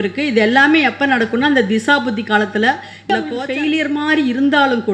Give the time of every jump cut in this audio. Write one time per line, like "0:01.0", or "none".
0:03.2